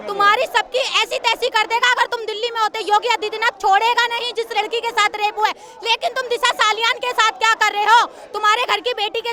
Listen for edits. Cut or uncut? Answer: uncut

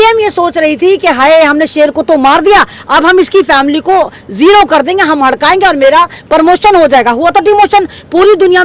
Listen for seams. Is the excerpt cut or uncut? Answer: uncut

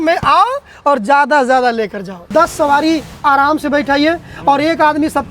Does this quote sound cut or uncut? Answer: cut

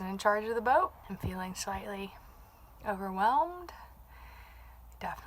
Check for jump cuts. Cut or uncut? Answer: cut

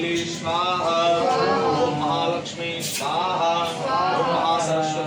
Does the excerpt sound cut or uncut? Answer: uncut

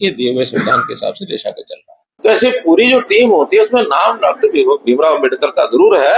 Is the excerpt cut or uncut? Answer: cut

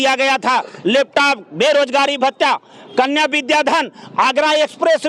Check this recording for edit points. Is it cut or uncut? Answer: uncut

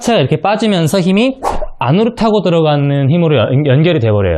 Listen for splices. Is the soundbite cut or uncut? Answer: uncut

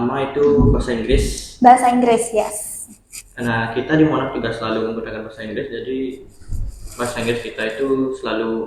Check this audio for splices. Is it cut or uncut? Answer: uncut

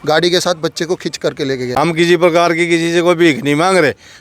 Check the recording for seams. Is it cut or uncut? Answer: cut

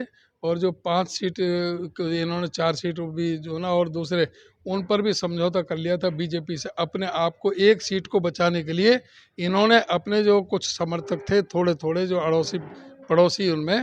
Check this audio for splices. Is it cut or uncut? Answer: uncut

